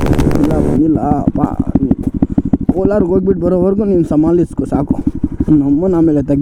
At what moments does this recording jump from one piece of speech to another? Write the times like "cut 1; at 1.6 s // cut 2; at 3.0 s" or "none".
none

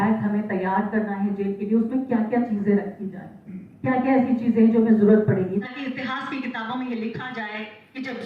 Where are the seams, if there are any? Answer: cut 1; at 5.6 s

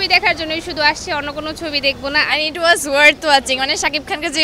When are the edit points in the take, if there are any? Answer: cut 1; at 2.3 s

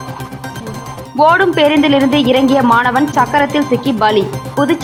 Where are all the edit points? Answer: none

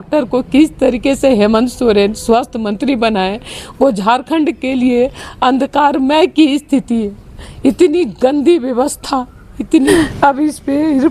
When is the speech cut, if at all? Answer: cut 1; at 9.9 s

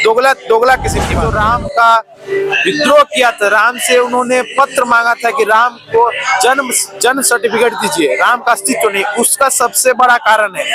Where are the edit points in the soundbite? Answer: cut 1; at 1.2 s

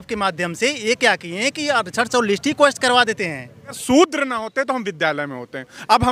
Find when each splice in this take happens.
cut 1; at 3.8 s

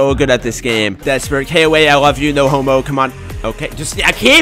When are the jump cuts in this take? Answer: cut 1; at 0.9 s

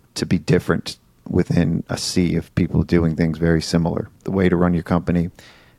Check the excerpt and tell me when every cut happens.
cut 1; at 4.2 s

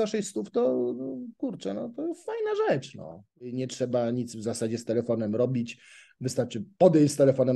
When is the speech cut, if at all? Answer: cut 1; at 3.5 s

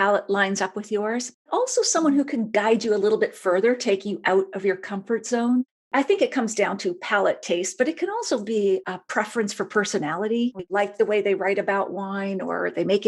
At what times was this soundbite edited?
cut 1; at 5.7 s // cut 2; at 10.6 s

